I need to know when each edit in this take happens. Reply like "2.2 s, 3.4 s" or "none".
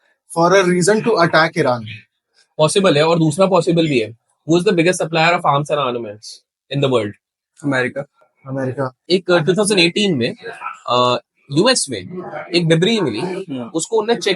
9.0 s